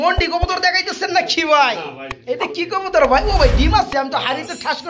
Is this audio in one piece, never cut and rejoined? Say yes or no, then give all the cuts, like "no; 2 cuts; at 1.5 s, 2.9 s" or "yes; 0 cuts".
yes; 0 cuts